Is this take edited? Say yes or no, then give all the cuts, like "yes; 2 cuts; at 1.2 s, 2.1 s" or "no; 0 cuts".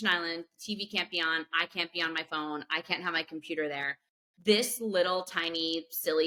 no; 0 cuts